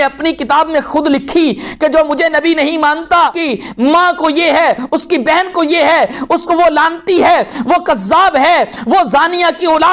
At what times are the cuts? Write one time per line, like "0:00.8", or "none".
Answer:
0:03.4